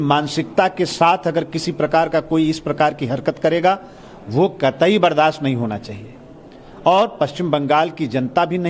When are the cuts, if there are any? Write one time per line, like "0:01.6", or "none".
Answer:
0:03.6